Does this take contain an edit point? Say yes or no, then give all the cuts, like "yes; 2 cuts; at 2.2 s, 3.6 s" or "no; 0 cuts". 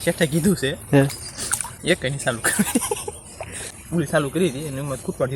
yes; 1 cut; at 3.6 s